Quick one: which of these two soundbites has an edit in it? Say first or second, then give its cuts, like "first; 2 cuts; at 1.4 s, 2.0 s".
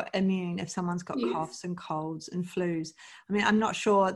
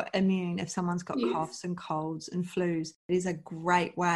second; 1 cut; at 3.0 s